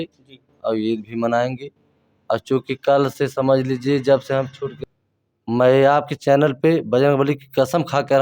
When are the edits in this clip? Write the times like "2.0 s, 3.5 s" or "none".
4.7 s